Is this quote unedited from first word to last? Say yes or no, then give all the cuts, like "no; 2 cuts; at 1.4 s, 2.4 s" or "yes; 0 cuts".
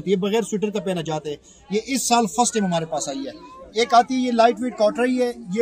yes; 0 cuts